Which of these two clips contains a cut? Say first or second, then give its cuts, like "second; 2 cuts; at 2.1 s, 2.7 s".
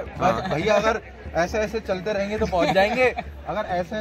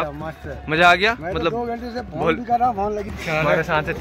second; 1 cut; at 3.1 s